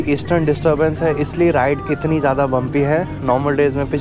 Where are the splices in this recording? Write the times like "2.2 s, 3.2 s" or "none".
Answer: none